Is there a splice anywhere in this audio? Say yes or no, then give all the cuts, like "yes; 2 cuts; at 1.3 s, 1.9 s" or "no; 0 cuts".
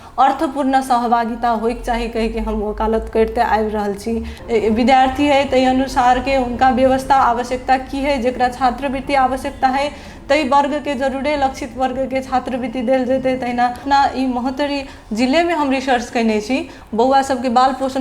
yes; 2 cuts; at 4.3 s, 13.8 s